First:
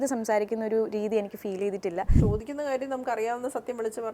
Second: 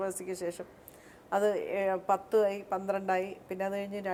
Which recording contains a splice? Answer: first; 1 cut; at 2.1 s

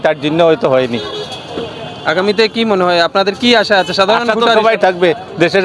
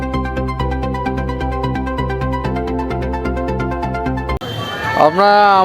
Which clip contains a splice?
second; 1 cut; at 4.4 s

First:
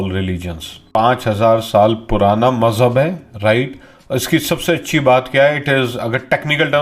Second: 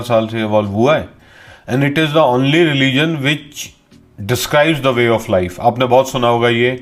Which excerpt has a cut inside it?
first; 1 cut; at 1.0 s

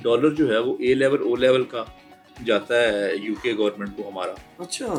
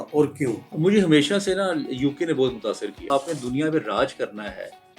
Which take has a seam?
second; 1 cut; at 3.1 s

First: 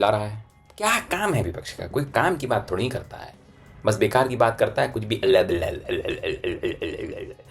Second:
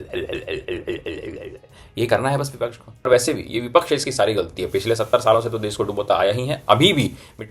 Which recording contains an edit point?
second; 1 cut; at 3.1 s

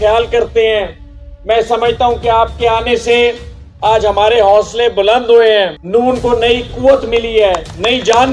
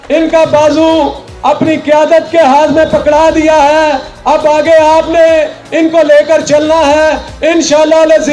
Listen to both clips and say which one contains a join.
first; 1 cut; at 5.8 s

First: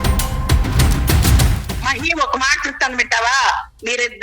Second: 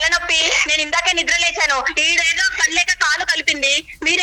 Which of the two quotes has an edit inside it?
first; 1 cut; at 1.3 s

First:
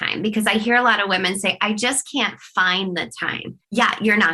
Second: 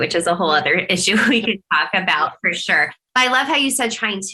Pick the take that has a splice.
first; 1 cut; at 3.4 s

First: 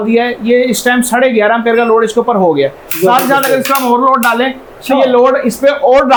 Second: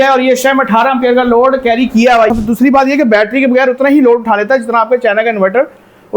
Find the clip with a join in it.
second; 1 cut; at 2.3 s

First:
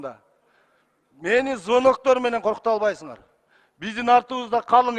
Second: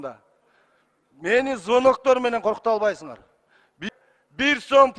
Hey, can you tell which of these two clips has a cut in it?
second; 1 cut; at 3.9 s

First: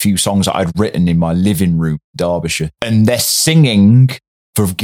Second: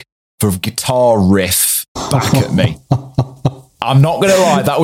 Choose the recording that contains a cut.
second; 1 cut; at 1.9 s

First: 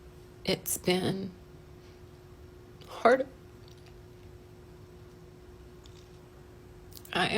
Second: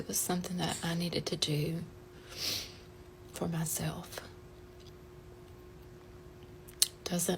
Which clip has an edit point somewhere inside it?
first; 1 cut; at 6.2 s

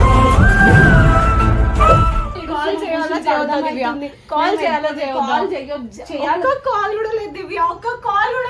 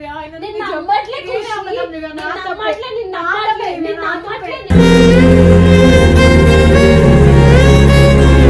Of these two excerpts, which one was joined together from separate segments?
first; 1 cut; at 2.3 s

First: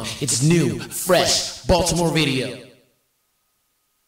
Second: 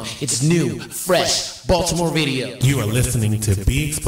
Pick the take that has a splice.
second; 1 cut; at 2.5 s

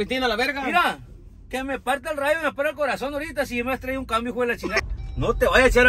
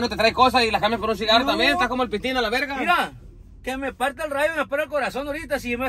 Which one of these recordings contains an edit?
first; 1 cut; at 4.8 s

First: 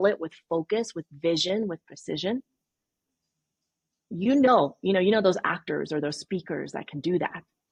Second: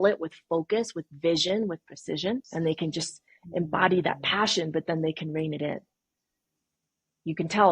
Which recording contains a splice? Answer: second; 1 cut; at 2.5 s

